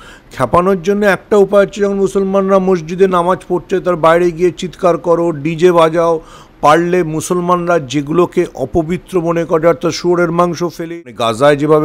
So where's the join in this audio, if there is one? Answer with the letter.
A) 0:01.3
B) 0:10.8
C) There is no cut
B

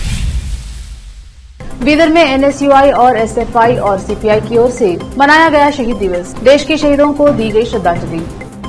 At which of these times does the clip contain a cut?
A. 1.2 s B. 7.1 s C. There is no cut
A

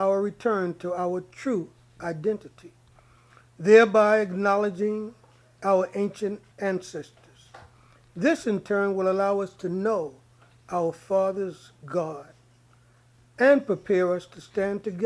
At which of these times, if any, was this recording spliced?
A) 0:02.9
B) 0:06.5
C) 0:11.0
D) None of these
B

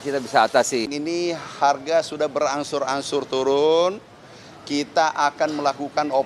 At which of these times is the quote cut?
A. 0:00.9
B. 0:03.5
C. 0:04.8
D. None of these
A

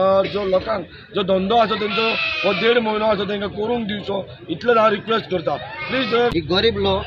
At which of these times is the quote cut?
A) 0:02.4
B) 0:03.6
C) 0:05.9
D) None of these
C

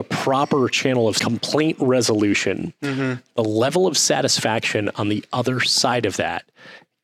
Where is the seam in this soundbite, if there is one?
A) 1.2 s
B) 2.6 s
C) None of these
A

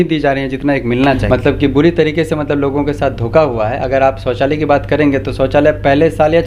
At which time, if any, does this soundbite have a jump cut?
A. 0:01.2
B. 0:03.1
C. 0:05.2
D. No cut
A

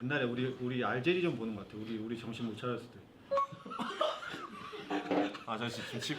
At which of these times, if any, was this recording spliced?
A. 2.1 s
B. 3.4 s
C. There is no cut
C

